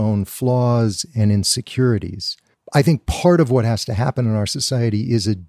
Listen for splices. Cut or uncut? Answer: cut